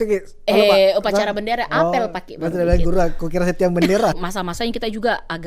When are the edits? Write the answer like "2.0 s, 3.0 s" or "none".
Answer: 4.2 s